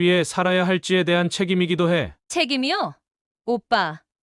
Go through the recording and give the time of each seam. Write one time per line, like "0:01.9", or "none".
0:02.2